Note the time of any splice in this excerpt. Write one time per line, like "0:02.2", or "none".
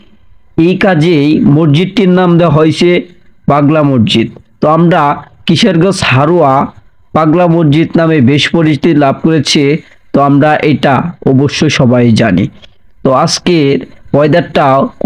none